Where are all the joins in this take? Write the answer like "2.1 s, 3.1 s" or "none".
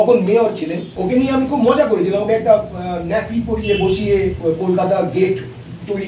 0.9 s, 4.4 s